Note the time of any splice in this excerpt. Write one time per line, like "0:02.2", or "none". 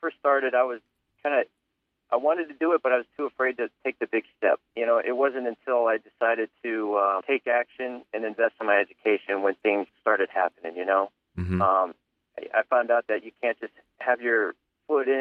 0:04.7
0:07.2
0:09.9